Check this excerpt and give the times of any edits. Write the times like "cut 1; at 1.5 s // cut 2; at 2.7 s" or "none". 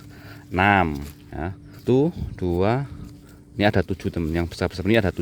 cut 1; at 1.8 s